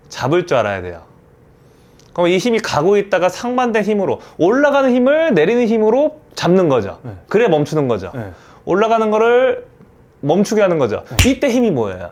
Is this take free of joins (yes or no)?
yes